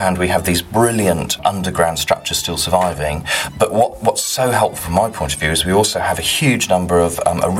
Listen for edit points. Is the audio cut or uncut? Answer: cut